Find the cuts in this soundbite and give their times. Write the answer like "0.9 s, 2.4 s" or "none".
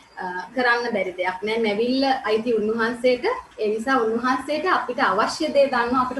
3.5 s